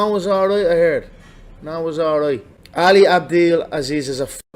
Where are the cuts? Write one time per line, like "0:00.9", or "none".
0:02.6